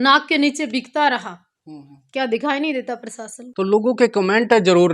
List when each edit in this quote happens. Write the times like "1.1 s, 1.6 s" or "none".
3.4 s